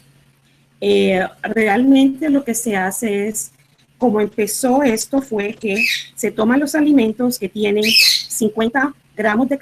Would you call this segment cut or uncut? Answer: cut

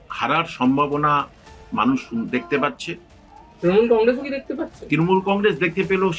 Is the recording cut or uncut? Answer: uncut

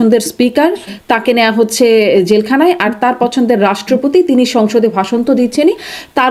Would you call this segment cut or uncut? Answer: uncut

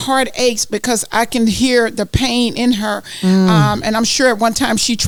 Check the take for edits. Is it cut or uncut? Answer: uncut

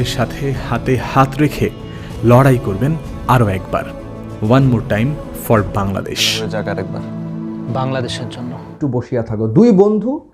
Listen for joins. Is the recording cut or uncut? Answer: cut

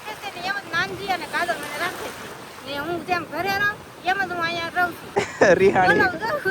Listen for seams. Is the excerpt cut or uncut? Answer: cut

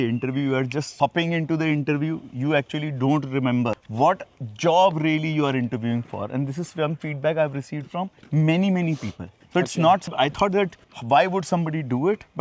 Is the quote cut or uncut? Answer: uncut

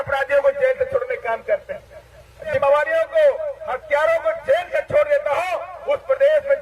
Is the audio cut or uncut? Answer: cut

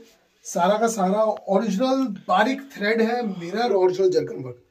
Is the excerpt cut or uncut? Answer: cut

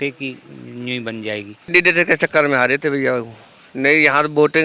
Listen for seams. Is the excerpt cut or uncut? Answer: cut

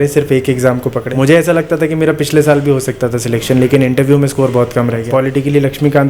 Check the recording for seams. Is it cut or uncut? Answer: cut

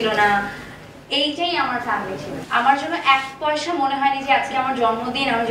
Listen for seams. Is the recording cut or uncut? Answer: cut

